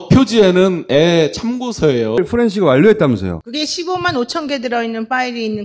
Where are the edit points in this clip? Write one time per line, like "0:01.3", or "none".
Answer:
0:02.2